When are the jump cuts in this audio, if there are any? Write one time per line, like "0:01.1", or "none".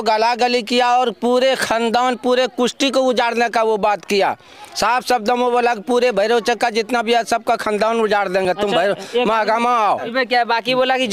none